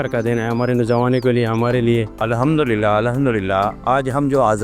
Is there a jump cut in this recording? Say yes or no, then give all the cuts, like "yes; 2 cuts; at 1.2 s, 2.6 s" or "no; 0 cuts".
yes; 1 cut; at 2.1 s